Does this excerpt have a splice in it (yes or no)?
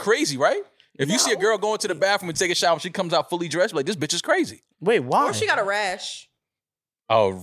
no